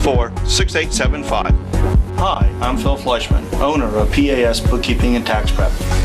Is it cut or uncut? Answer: cut